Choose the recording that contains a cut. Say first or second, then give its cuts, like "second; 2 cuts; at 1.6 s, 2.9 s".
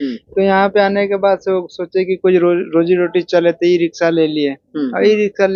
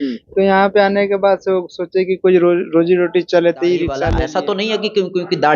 second; 1 cut; at 4.1 s